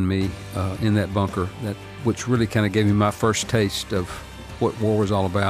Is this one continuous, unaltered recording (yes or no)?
no